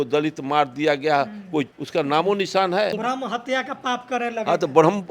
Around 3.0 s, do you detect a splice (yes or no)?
yes